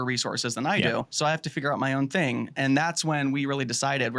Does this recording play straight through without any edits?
no; 1 cut; at 1.1 s

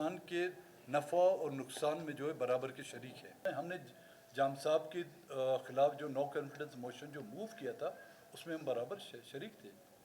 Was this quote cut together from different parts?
yes; 1 cut; at 3.4 s

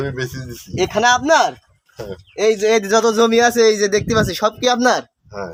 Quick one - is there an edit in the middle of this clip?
no; 0 cuts

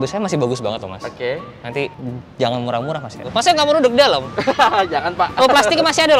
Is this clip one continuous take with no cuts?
no; 2 cuts; at 2.0 s, 3.2 s

